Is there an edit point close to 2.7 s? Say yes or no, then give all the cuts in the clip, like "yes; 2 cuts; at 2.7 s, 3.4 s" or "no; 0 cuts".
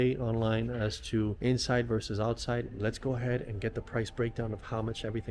yes; 2 cuts; at 1.4 s, 2.7 s